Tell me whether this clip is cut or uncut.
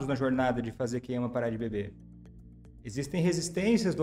uncut